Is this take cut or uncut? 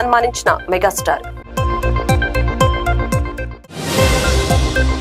uncut